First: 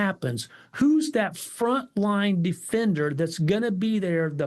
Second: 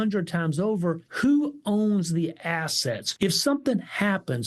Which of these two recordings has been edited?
second; 2 cuts; at 1.1 s, 3.1 s

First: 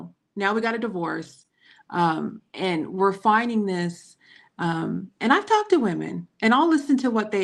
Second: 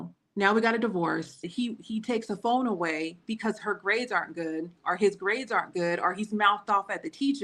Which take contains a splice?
second; 1 cut; at 1.5 s

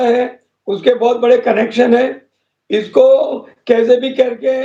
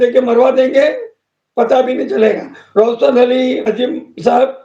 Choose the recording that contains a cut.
second; 2 cuts; at 2.5 s, 3.6 s

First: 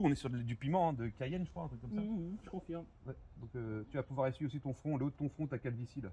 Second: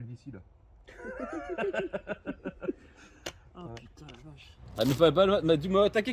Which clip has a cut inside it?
second; 1 cut; at 4.5 s

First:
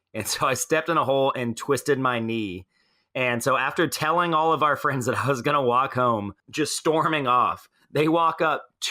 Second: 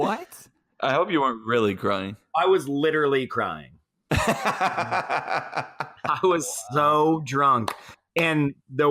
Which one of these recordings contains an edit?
first; 1 cut; at 6.4 s

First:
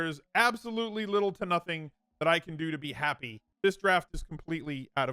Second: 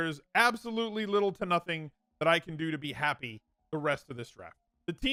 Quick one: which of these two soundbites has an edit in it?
first; 1 cut; at 3.5 s

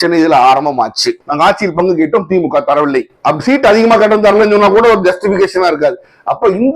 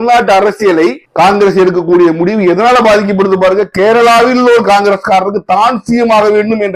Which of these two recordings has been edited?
first; 1 cut; at 1.2 s

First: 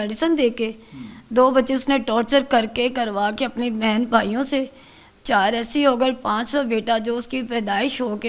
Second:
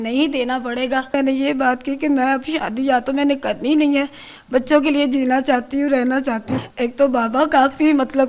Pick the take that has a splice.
second; 2 cuts; at 1.1 s, 6.6 s

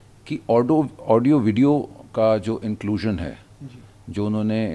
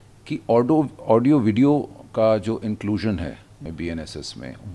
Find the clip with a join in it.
second; 1 cut; at 3.6 s

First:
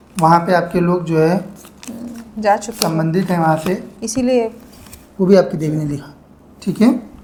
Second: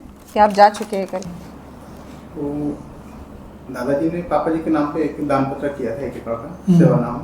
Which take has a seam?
second; 1 cut; at 1.2 s

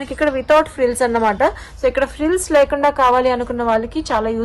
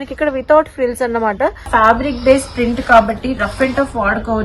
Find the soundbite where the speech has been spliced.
second; 1 cut; at 1.6 s

